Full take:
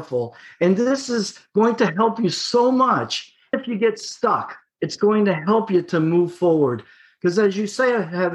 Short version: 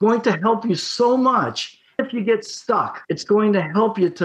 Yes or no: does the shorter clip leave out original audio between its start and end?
yes